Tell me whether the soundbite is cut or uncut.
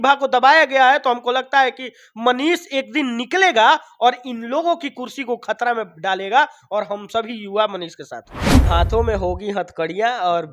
cut